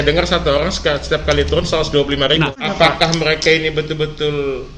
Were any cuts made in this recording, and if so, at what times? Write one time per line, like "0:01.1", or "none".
0:02.5